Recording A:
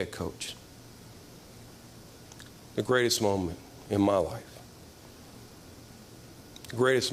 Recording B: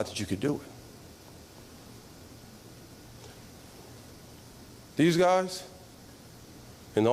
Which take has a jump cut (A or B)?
B